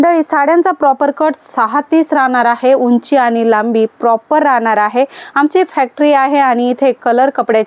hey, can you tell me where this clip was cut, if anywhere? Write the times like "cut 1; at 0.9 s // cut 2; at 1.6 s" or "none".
none

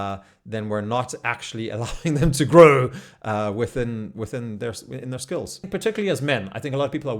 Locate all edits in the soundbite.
cut 1; at 5.7 s

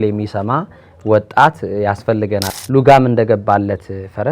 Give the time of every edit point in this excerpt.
cut 1; at 2.5 s

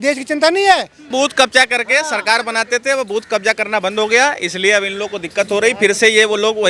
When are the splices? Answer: cut 1; at 1.1 s

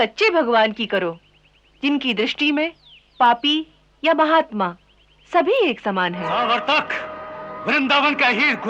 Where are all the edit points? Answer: cut 1; at 6.3 s

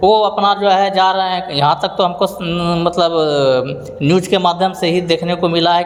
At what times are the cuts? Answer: none

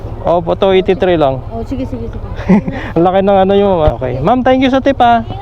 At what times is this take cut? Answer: cut 1; at 3.9 s

